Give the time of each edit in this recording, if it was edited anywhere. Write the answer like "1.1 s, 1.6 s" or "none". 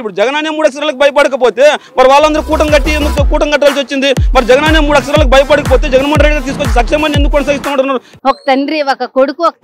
8.1 s